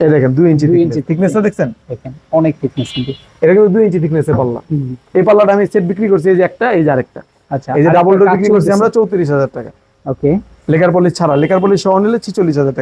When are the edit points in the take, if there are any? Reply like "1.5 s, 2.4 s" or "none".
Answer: none

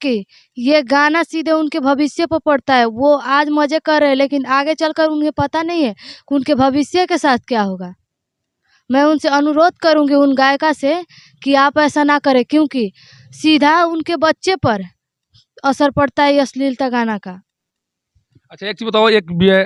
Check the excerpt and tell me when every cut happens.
none

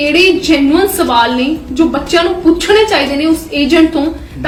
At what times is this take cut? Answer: none

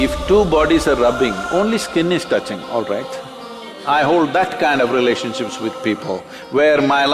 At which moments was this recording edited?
3.7 s

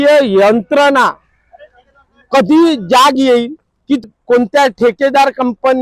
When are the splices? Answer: 4.0 s

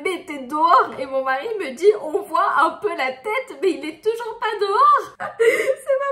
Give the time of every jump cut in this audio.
5.2 s

